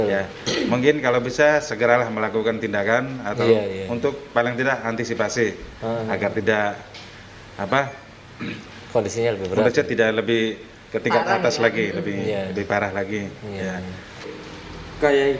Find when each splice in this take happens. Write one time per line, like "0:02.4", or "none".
0:14.2

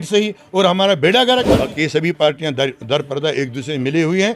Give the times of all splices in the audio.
0:01.5

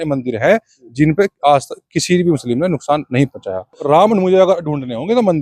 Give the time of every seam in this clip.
0:03.8

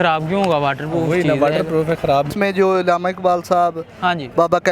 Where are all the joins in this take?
0:02.3

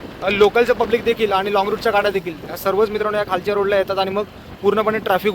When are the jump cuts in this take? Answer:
none

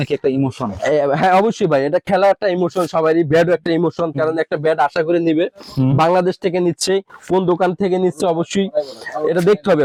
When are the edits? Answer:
none

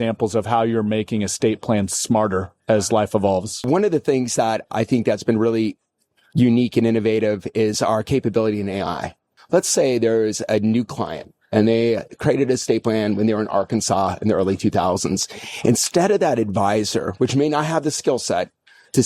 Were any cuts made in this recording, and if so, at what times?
0:03.7
0:09.3

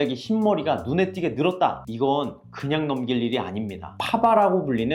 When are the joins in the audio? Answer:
0:03.9

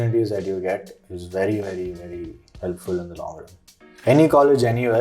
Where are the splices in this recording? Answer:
0:03.9

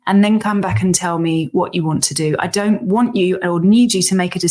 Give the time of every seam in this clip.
none

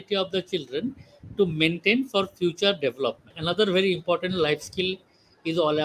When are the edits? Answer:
0:03.3

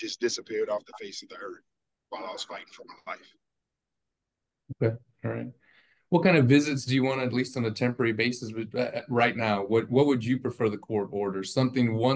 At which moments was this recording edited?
none

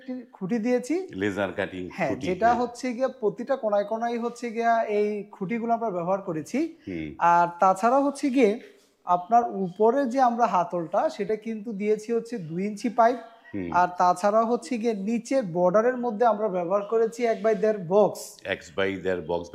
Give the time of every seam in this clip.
none

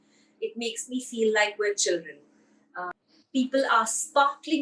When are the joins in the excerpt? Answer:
0:02.9

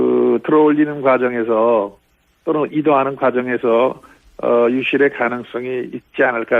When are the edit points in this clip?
0:05.4

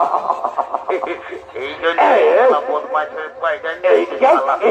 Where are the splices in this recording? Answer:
none

